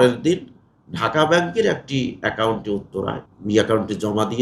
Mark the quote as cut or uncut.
cut